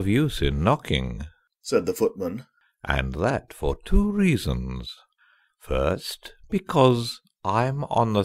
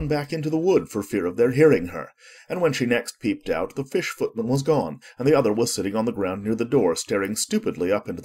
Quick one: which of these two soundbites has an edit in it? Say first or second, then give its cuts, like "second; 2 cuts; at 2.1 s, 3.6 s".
second; 1 cut; at 1.2 s